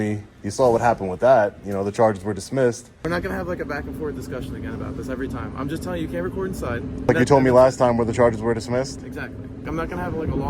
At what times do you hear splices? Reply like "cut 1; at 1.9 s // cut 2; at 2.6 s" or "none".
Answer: cut 1; at 2.9 s // cut 2; at 7.1 s // cut 3; at 9.6 s